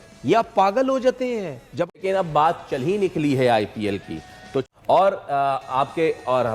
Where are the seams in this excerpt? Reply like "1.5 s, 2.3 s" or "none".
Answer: 2.0 s, 4.6 s

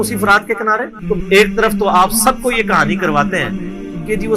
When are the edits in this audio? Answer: 1.0 s

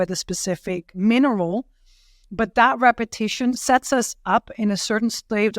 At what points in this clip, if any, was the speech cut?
0.9 s, 3.6 s

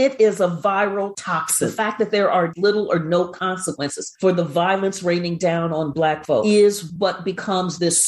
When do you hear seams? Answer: 1.6 s, 6.4 s

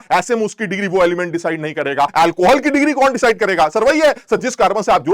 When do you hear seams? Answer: 2.1 s

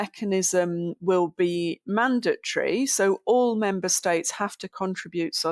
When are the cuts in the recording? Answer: none

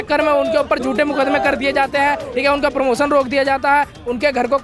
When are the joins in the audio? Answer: none

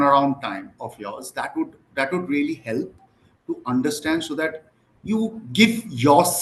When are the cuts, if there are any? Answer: none

